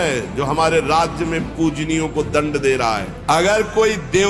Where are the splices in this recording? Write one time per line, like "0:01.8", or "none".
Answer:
0:03.1